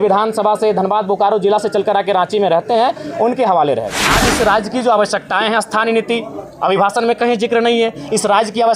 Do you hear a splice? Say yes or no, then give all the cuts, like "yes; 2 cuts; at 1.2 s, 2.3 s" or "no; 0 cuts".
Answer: yes; 1 cut; at 4.0 s